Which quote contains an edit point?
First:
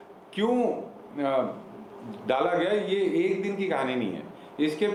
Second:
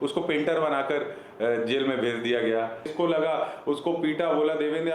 second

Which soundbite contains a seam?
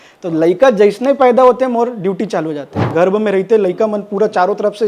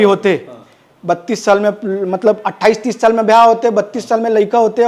first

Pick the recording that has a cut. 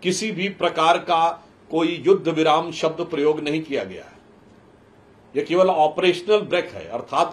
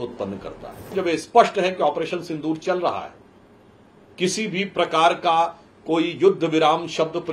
second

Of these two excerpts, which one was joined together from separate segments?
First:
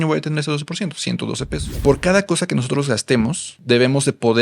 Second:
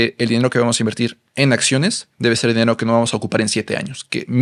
first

